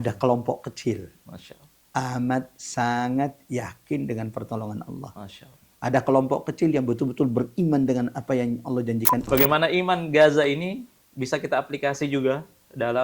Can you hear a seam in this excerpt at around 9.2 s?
yes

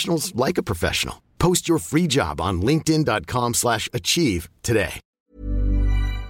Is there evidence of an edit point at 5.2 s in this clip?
yes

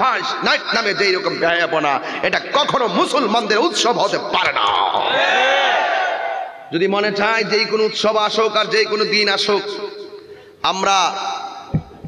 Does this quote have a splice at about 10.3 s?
no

